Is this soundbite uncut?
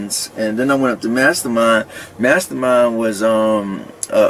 yes; 0 cuts

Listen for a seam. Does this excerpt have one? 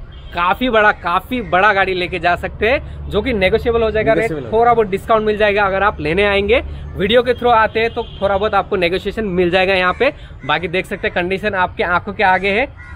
no; 0 cuts

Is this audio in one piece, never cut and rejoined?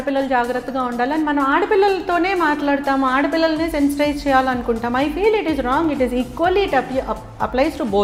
yes; 0 cuts

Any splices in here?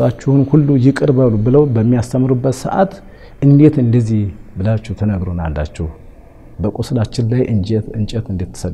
no; 0 cuts

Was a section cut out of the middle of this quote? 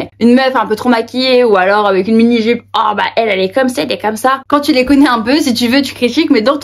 yes; 1 cut; at 4.4 s

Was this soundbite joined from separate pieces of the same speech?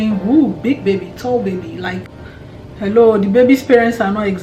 yes; 1 cut; at 2.1 s

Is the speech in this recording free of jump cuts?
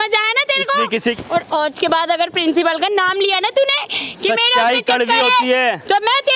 no; 1 cut; at 1.1 s

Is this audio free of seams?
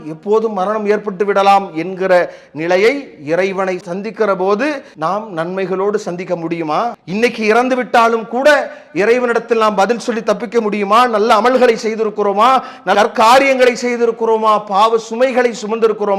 no; 2 cuts; at 4.9 s, 7.0 s

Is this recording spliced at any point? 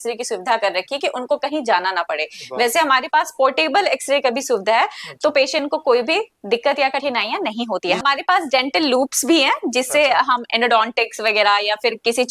no; 0 cuts

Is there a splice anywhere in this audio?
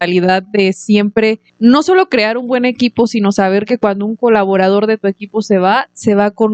yes; 1 cut; at 1.5 s

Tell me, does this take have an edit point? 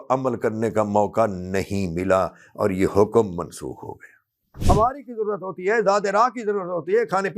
yes; 1 cut; at 4.6 s

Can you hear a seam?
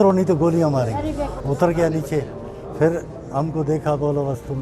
yes; 1 cut; at 1.4 s

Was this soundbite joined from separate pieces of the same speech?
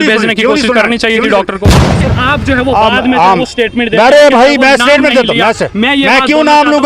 yes; 1 cut; at 2.0 s

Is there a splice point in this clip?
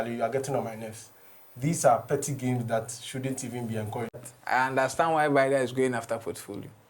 yes; 1 cut; at 4.3 s

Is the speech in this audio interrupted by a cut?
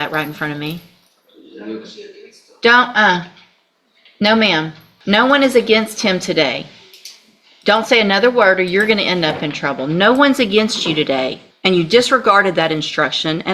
yes; 2 cuts; at 4.9 s, 11.4 s

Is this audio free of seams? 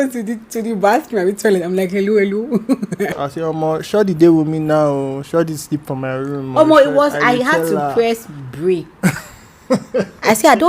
no; 1 cut; at 3.2 s

